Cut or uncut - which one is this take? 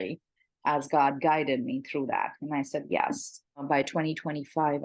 cut